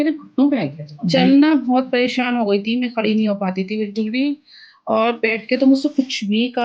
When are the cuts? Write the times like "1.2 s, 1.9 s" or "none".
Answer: 1.0 s